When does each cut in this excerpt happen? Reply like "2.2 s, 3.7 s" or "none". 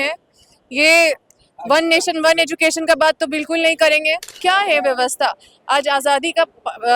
4.3 s